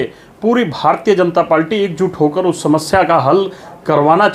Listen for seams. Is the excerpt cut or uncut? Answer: uncut